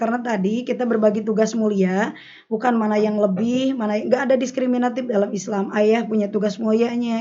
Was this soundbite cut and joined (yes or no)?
no